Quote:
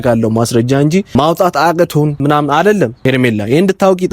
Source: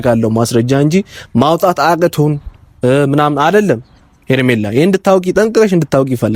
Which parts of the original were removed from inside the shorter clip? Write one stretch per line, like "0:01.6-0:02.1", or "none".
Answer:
0:01.1-0:01.3
0:02.4-0:03.1
0:03.8-0:04.2